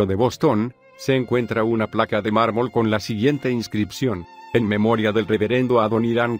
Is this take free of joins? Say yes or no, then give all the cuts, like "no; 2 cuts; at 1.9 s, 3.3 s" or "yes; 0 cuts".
no; 1 cut; at 4.9 s